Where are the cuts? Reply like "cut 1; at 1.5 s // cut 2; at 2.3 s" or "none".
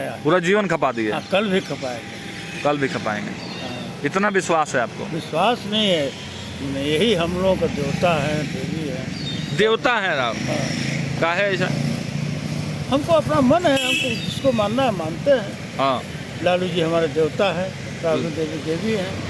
none

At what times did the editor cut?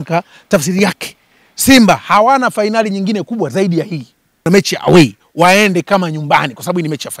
cut 1; at 4.5 s

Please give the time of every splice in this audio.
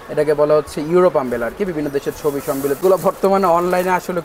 cut 1; at 2.8 s

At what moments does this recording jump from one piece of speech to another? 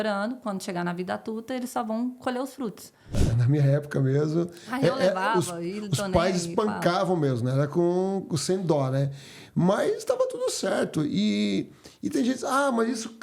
cut 1; at 3.2 s

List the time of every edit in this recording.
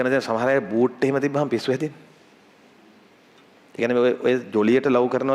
none

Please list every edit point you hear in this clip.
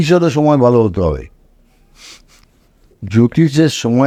none

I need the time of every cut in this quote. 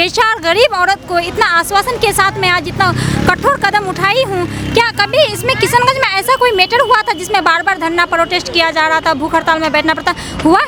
none

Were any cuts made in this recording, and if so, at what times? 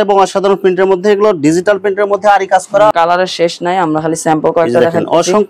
cut 1; at 2.9 s

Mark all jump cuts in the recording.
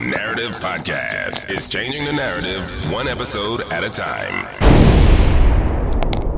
cut 1; at 4.5 s

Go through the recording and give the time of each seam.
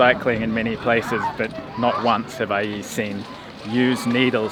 none

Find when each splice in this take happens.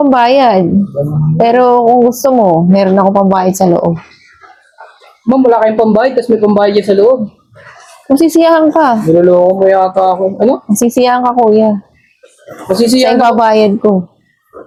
none

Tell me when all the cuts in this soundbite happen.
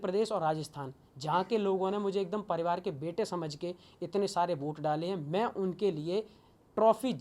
none

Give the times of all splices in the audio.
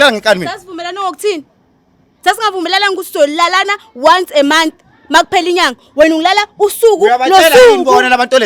none

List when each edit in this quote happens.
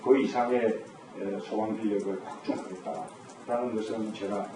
none

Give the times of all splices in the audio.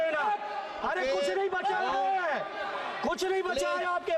none

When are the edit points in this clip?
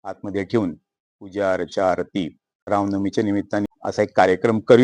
cut 1; at 2.7 s // cut 2; at 3.7 s

